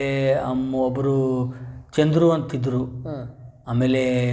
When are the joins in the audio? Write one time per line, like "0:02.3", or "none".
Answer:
none